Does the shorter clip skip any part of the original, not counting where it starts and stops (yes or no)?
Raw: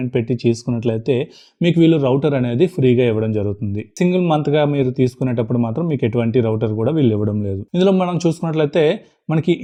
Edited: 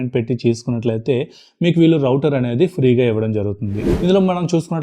yes